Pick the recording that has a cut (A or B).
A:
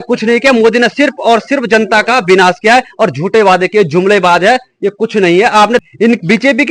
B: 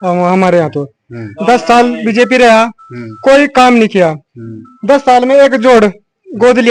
A